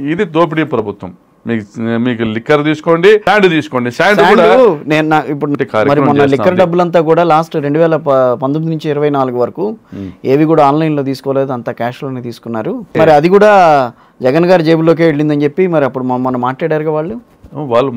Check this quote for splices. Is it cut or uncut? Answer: cut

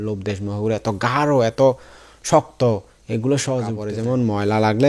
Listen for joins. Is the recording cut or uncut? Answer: cut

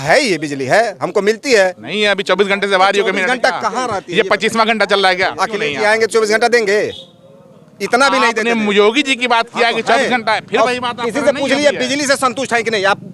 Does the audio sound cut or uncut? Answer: uncut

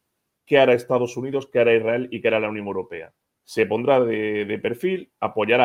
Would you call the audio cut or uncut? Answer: uncut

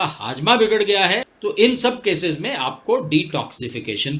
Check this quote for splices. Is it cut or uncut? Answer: cut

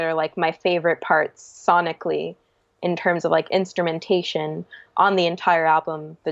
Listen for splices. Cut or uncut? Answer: uncut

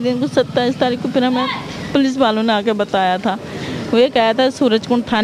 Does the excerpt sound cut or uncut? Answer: uncut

